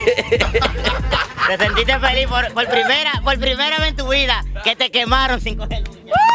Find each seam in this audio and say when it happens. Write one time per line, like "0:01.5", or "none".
none